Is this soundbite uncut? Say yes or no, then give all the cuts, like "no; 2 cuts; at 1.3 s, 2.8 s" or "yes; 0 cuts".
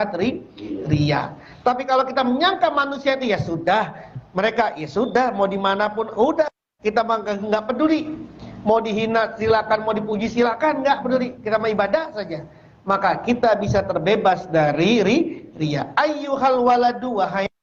yes; 0 cuts